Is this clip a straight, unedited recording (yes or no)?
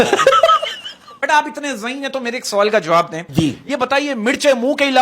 no